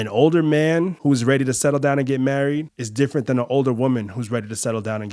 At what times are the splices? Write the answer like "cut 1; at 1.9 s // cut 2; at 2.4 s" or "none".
cut 1; at 0.9 s // cut 2; at 2.8 s